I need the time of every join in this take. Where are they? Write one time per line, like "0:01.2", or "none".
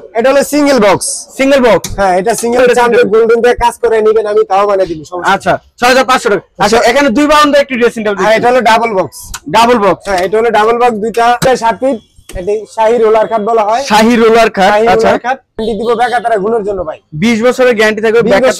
0:02.6
0:11.5
0:15.6